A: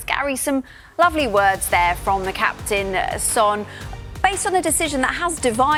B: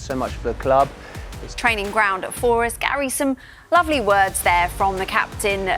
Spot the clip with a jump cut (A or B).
B